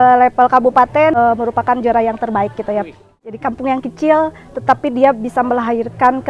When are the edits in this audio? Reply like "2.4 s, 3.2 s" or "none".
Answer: 1.2 s, 3.0 s